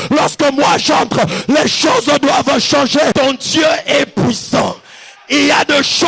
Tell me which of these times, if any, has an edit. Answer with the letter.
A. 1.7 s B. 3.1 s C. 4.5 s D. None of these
B